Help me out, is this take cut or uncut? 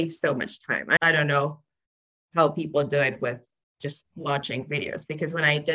cut